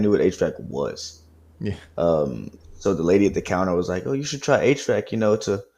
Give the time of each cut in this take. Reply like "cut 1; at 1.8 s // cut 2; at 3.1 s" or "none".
none